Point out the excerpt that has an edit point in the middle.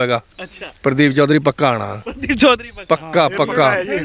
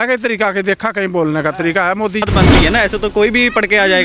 second; 1 cut; at 2.2 s

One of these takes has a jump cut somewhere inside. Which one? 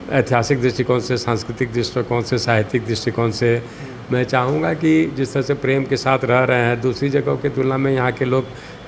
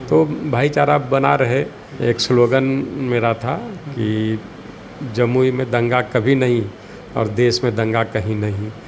second; 1 cut; at 1.9 s

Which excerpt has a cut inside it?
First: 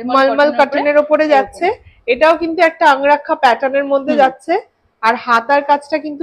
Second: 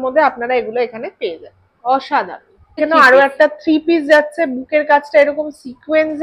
second; 1 cut; at 2.8 s

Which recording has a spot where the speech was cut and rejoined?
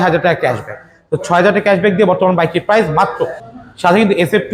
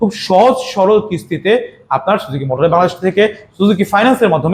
first; 1 cut; at 3.4 s

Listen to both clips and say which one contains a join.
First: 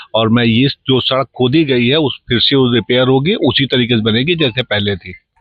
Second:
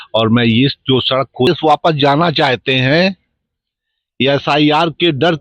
second; 1 cut; at 1.5 s

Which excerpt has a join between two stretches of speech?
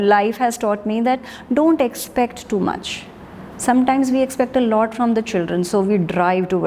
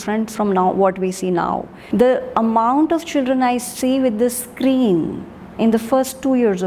second; 1 cut; at 1.7 s

